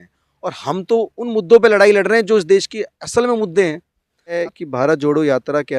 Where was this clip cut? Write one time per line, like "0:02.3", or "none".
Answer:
0:04.4